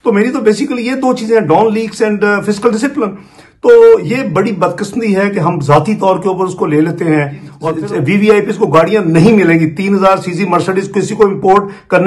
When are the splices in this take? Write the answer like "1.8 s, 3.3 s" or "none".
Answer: 7.5 s